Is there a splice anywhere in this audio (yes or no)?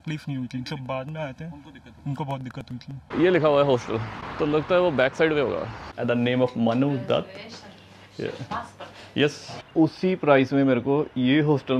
yes